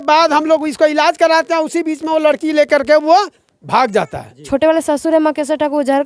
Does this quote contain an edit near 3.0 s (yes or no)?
no